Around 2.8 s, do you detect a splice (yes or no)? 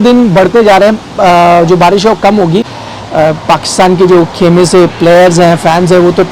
yes